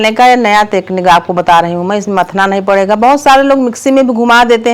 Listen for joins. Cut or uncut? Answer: uncut